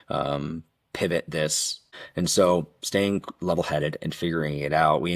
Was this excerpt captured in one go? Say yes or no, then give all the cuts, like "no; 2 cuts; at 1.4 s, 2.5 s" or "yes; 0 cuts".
no; 1 cut; at 1.8 s